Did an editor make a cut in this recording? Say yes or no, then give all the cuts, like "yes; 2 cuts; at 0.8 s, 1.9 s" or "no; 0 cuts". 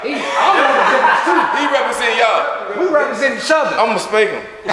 no; 0 cuts